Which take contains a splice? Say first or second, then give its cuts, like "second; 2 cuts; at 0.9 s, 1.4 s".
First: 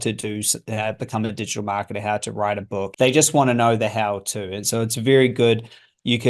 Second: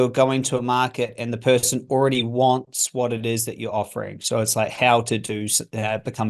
first; 1 cut; at 2.9 s